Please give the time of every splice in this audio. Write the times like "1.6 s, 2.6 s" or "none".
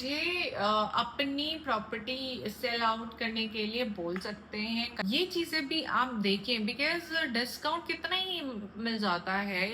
4.9 s

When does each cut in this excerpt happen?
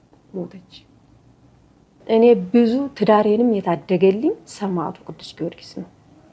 2.0 s

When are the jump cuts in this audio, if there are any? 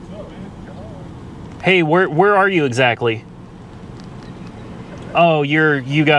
none

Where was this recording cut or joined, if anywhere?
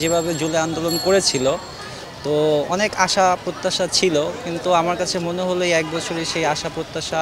none

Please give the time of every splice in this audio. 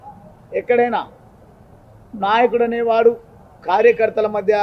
3.0 s

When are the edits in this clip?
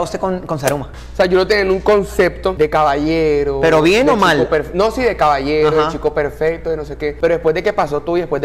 0.9 s

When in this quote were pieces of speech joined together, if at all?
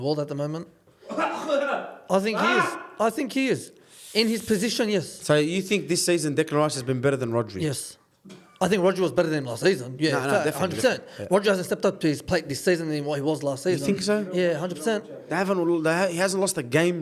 none

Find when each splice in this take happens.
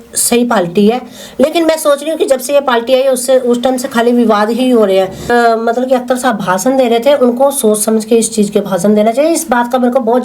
5.3 s

